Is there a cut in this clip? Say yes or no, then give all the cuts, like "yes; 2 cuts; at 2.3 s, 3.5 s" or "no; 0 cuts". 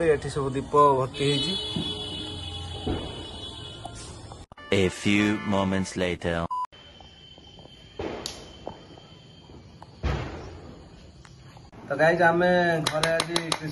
no; 0 cuts